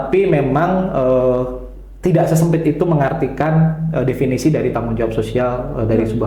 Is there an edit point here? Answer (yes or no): no